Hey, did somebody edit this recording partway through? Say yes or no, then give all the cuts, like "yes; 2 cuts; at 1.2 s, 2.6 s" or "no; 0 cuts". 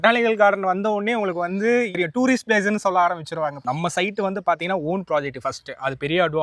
yes; 2 cuts; at 1.9 s, 3.6 s